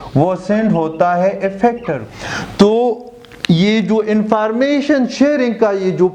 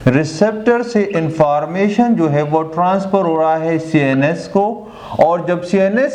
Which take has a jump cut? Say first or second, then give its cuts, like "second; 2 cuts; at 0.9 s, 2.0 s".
first; 1 cut; at 2.0 s